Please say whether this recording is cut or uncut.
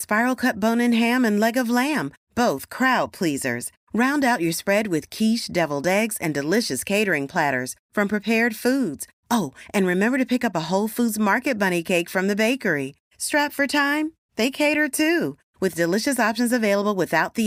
uncut